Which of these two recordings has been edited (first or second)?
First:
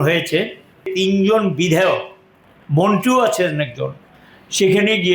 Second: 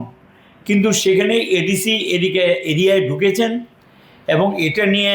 first